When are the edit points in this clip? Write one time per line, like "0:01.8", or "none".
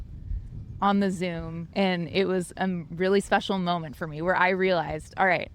0:01.6